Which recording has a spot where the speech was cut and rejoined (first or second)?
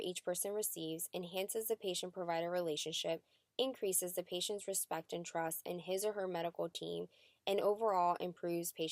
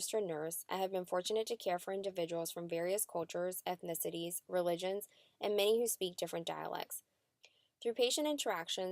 second